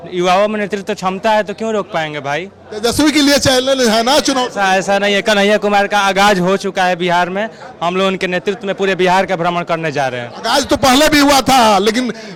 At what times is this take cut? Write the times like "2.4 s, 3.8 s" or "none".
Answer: none